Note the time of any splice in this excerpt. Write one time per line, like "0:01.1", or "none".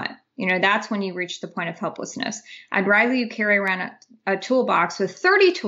none